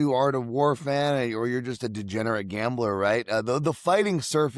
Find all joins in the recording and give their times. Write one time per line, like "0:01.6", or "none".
none